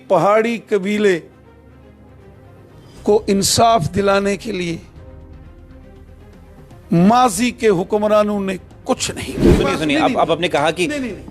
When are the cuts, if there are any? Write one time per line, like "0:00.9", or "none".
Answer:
0:09.4